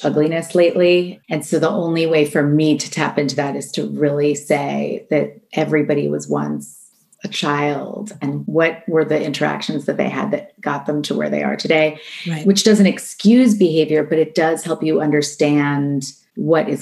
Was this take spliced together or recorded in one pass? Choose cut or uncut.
uncut